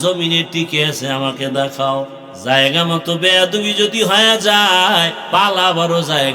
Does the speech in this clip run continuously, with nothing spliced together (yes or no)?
no